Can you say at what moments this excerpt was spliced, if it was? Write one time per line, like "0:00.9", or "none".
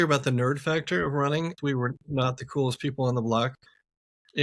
0:01.6